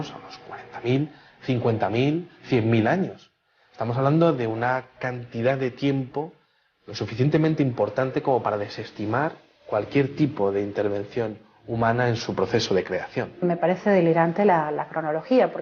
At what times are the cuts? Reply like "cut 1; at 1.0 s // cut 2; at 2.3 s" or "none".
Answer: cut 1; at 4.7 s